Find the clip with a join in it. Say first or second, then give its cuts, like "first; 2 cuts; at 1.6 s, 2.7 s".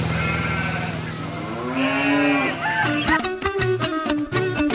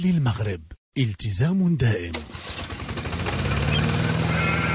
second; 1 cut; at 2.1 s